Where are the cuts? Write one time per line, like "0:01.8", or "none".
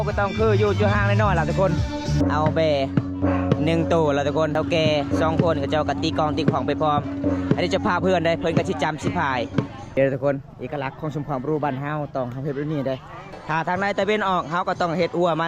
0:02.2
0:04.5
0:09.9
0:13.2